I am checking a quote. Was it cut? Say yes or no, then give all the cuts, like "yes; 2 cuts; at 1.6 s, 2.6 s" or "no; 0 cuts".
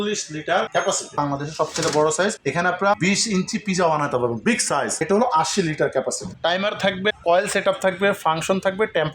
yes; 3 cuts; at 1.2 s, 5.0 s, 6.2 s